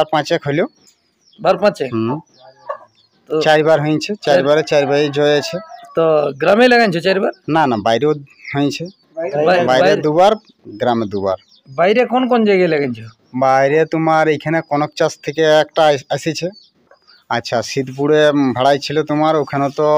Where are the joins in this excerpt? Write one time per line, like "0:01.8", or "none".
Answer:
none